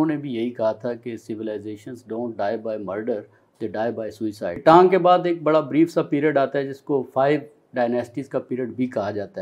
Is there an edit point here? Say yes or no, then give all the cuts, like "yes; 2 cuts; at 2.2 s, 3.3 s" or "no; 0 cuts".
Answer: yes; 1 cut; at 4.6 s